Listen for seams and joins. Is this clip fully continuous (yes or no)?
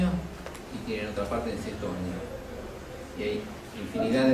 no